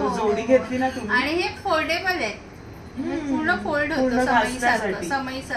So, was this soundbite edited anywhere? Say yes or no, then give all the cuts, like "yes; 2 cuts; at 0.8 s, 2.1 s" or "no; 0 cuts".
no; 0 cuts